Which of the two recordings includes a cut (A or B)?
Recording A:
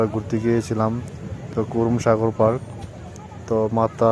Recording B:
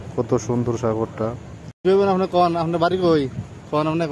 B